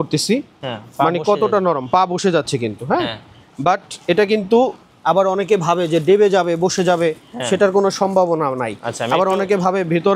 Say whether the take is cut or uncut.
uncut